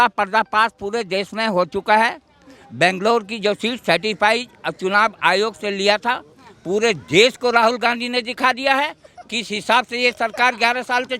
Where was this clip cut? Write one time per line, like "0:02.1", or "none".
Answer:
none